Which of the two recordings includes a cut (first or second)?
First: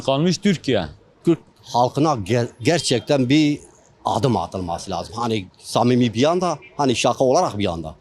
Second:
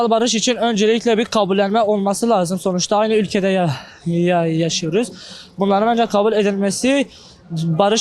first